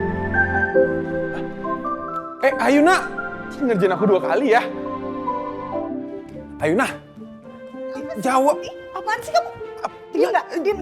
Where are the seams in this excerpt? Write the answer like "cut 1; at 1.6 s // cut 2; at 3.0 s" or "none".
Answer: cut 1; at 6.2 s